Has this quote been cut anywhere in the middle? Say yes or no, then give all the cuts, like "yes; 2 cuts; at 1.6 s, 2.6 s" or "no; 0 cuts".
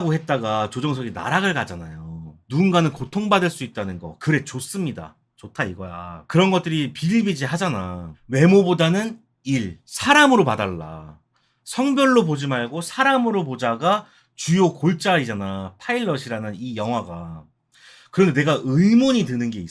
yes; 1 cut; at 2.4 s